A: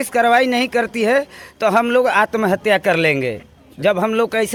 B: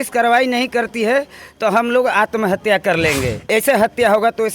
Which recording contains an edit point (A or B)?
B